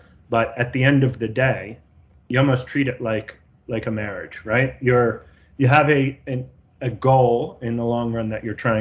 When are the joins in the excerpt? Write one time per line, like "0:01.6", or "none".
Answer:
none